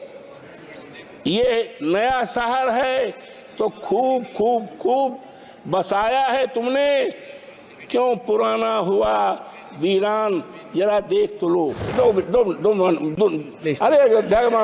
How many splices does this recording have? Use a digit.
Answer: 1